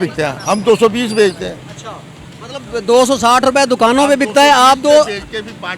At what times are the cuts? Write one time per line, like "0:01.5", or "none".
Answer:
none